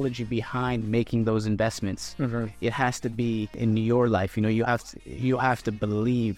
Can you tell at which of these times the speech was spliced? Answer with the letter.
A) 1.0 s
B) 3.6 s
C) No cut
B